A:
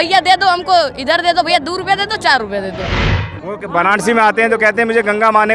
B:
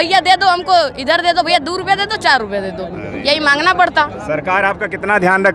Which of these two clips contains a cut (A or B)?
A